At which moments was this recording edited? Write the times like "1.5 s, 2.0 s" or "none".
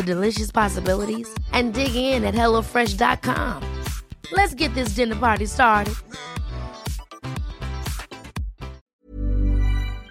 8.8 s